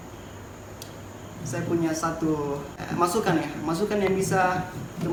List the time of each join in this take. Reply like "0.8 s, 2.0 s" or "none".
none